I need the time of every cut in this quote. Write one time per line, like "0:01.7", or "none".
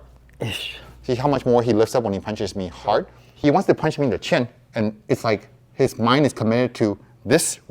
0:03.2